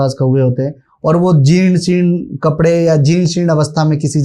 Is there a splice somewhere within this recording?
no; 0 cuts

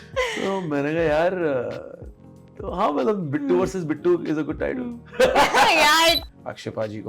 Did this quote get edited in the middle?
yes; 1 cut; at 6.2 s

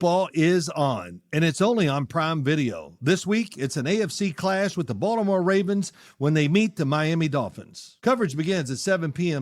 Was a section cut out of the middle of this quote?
yes; 1 cut; at 7.9 s

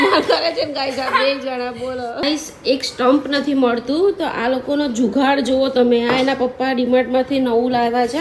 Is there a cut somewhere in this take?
yes; 1 cut; at 2.2 s

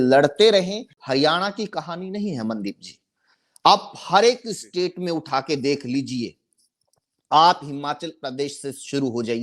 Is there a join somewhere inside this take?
yes; 1 cut; at 0.9 s

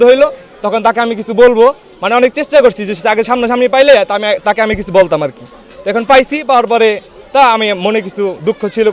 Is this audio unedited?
yes; 0 cuts

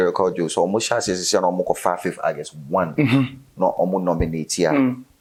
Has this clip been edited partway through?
no; 0 cuts

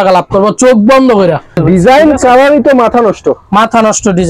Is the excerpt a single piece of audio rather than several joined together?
no; 1 cut; at 1.6 s

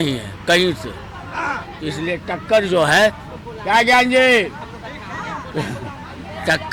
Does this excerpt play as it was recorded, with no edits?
yes; 0 cuts

